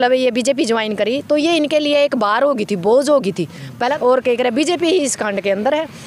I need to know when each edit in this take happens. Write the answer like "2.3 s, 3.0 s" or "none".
3.9 s